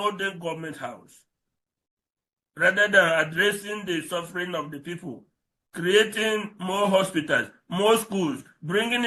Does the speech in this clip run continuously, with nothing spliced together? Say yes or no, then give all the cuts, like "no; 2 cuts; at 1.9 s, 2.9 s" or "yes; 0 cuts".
yes; 0 cuts